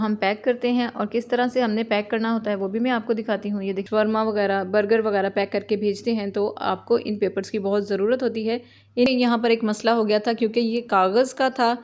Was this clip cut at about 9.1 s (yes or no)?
yes